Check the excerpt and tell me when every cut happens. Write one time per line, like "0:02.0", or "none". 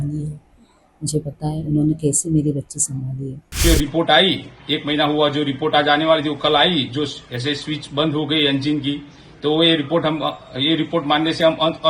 0:03.6